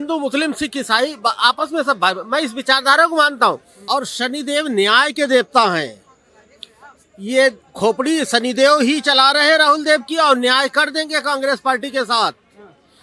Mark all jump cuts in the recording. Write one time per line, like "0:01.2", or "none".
0:03.7